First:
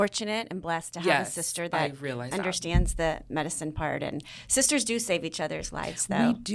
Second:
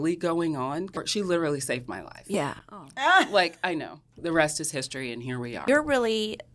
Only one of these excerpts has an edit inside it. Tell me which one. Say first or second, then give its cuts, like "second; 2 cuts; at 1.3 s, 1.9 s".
second; 3 cuts; at 0.9 s, 4.2 s, 5.6 s